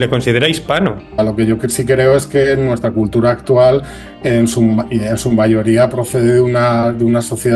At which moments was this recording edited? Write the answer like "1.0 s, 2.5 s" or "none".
1.2 s

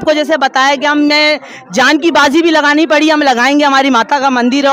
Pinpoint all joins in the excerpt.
none

